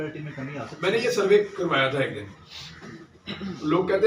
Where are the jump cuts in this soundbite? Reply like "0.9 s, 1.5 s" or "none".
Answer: none